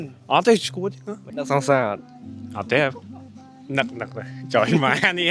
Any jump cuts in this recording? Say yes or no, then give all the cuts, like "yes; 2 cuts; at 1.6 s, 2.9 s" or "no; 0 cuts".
yes; 1 cut; at 1.3 s